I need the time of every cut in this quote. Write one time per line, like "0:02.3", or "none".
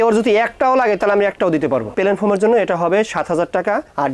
0:01.9